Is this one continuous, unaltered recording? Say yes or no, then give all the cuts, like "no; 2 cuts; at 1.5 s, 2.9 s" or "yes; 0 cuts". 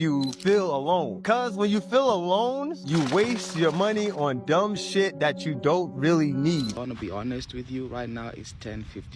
no; 1 cut; at 6.8 s